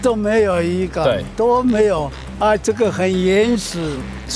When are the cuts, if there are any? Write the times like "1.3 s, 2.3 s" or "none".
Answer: none